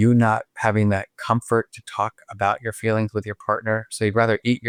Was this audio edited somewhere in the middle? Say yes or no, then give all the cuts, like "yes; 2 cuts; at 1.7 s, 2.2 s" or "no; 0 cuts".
no; 0 cuts